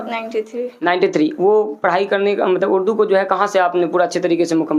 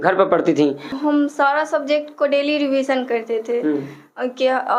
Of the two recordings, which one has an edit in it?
second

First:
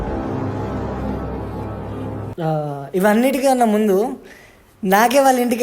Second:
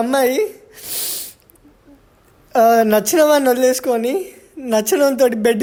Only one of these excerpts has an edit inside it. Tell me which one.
first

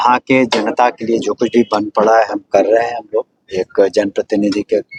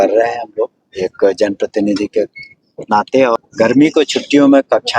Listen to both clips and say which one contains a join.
second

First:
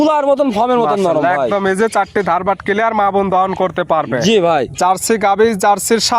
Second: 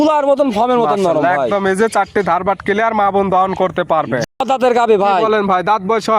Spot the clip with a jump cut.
second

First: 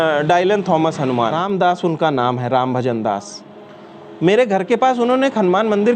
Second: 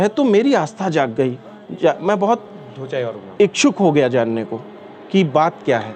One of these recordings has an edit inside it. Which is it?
first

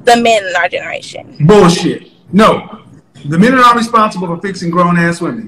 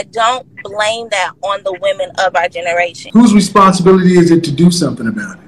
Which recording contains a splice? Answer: second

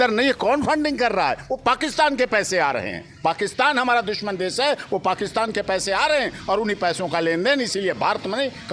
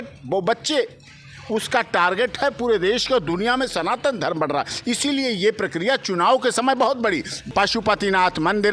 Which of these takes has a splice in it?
second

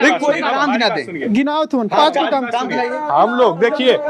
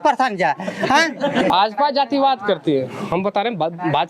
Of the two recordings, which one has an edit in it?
second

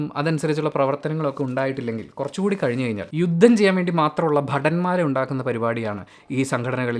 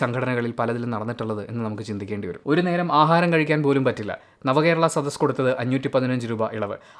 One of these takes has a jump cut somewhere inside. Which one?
second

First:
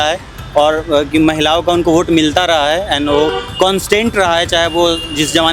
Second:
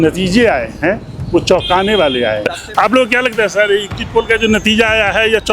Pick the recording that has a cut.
second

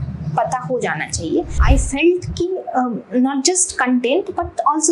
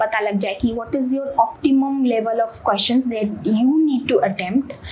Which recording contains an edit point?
first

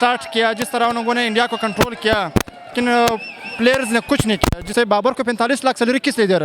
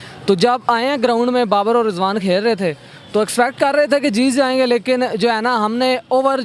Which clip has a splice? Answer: first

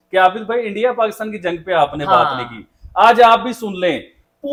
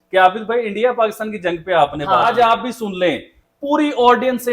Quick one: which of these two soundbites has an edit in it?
second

